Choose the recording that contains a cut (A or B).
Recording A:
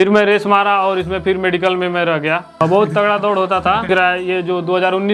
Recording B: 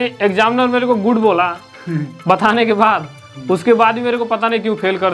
A